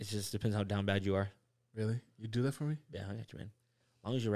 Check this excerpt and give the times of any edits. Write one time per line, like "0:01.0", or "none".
none